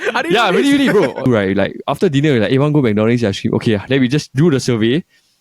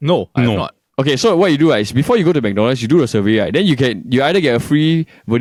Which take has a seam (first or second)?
first